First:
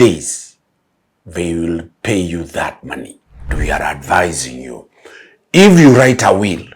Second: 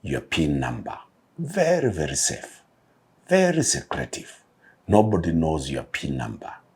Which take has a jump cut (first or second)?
first